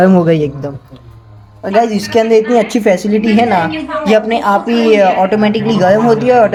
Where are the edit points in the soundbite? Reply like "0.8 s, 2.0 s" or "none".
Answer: none